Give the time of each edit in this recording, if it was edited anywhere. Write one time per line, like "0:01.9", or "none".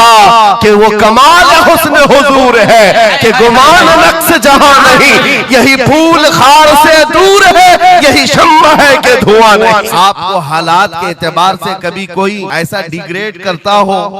0:09.9
0:12.5